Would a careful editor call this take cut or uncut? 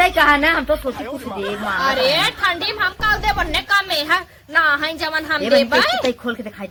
uncut